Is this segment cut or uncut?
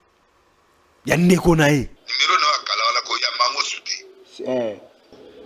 cut